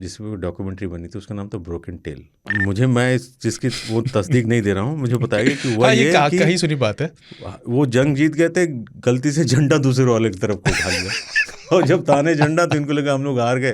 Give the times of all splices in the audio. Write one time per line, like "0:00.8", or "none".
0:02.5